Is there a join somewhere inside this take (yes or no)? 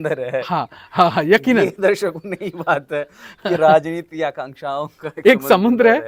no